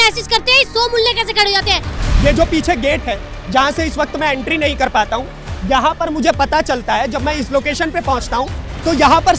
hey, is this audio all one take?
no; 1 cut; at 1.9 s

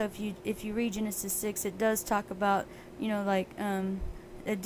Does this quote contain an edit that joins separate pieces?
no; 0 cuts

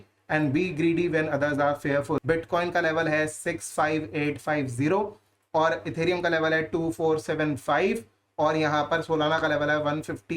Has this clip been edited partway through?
yes; 1 cut; at 2.2 s

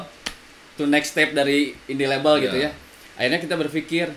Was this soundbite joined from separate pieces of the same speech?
no; 0 cuts

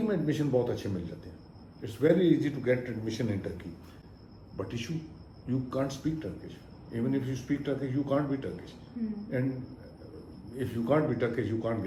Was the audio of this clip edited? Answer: no; 0 cuts

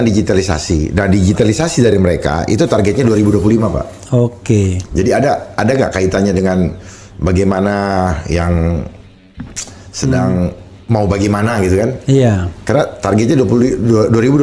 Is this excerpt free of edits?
yes; 0 cuts

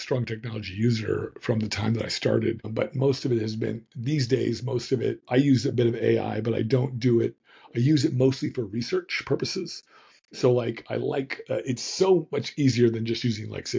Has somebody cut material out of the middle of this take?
yes; 2 cuts; at 2.7 s, 5.2 s

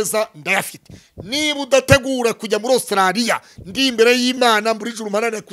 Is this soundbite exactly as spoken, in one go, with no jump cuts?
yes; 0 cuts

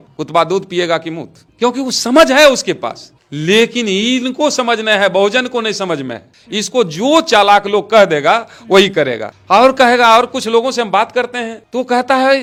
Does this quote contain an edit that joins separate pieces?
no; 0 cuts

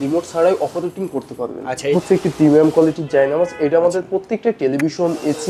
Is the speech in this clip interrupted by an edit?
yes; 1 cut; at 1.9 s

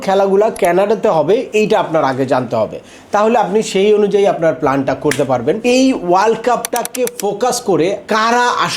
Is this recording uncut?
no; 3 cuts; at 5.6 s, 6.8 s, 8.0 s

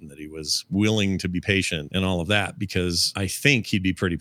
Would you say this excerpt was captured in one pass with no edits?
no; 2 cuts; at 1.9 s, 3.1 s

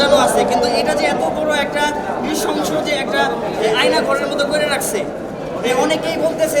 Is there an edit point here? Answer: no; 0 cuts

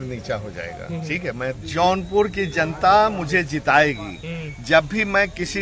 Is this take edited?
yes; 1 cut; at 1.6 s

